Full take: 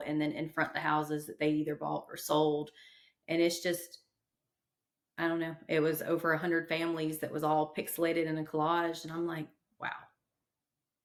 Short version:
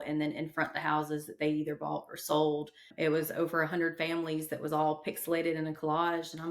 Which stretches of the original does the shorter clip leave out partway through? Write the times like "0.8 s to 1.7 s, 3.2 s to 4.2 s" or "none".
2.9 s to 5.6 s